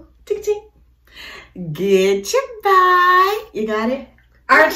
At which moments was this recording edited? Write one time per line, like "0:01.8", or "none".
none